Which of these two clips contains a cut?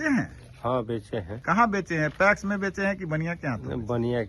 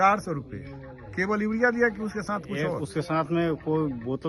first; 1 cut; at 1.3 s

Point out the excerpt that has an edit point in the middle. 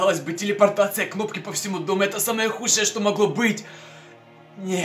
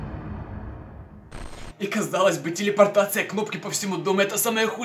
second; 1 cut; at 1.2 s

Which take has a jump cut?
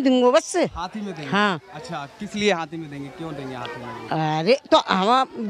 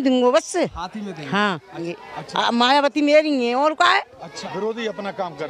second; 2 cuts; at 1.9 s, 4.4 s

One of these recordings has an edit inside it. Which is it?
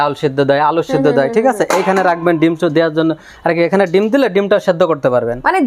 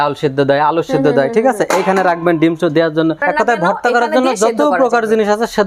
second; 1 cut; at 3.2 s

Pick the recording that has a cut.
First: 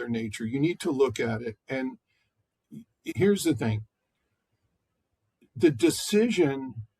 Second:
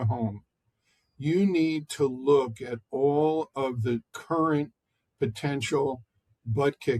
first; 1 cut; at 3.1 s

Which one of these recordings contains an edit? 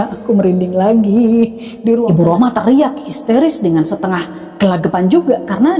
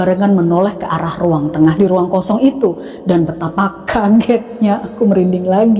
first; 1 cut; at 2.1 s

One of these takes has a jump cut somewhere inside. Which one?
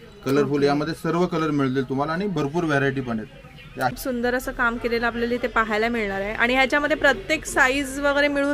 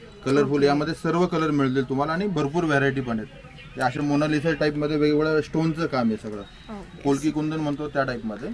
first; 1 cut; at 4.0 s

